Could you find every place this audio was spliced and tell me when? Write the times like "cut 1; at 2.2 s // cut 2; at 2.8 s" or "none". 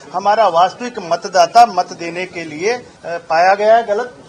cut 1; at 2.9 s